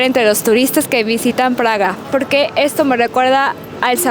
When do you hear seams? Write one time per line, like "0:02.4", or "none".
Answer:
0:02.0